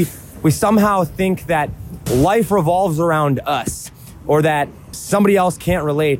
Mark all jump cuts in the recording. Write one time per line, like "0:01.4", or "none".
0:02.0
0:04.9